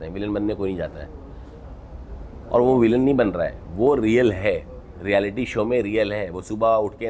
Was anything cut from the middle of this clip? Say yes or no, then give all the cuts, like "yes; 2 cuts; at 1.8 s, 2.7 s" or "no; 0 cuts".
no; 0 cuts